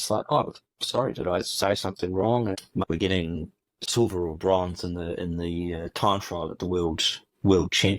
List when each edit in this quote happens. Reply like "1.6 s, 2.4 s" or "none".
2.7 s, 3.8 s